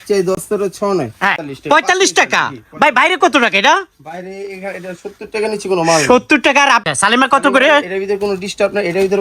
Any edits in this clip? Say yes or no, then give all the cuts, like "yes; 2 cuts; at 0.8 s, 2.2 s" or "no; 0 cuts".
yes; 2 cuts; at 1.5 s, 6.8 s